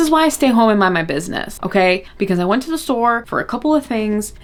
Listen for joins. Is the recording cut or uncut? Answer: uncut